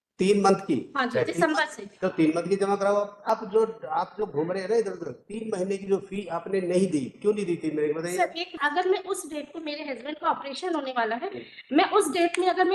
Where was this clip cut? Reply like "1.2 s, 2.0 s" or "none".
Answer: 3.3 s, 8.6 s